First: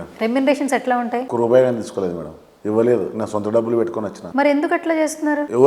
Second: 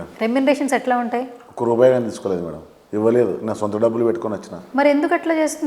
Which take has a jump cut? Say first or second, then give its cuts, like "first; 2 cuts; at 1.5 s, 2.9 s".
first; 2 cuts; at 1.2 s, 4.2 s